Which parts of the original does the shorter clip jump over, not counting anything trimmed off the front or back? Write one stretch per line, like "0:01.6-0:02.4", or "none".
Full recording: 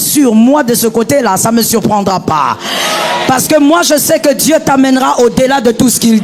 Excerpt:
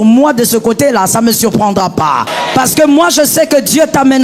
0:02.6-0:03.1